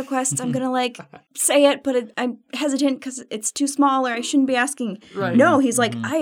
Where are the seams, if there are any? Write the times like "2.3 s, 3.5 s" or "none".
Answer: none